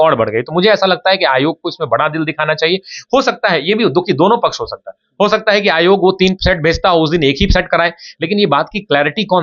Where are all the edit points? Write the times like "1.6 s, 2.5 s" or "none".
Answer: none